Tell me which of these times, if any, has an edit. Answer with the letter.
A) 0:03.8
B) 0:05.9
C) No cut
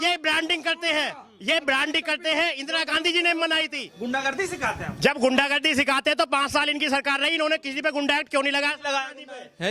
A